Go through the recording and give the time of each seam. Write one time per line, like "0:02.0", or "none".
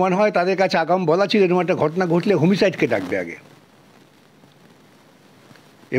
none